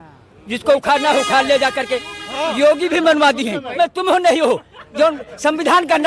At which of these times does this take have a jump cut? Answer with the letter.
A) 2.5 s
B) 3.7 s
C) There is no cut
B